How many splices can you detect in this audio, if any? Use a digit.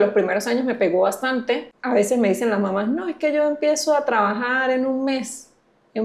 1